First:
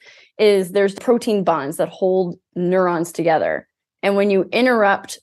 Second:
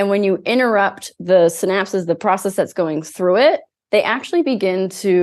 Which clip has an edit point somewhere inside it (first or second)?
first